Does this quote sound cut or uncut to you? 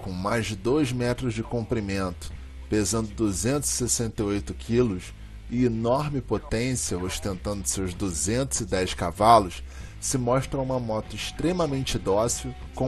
uncut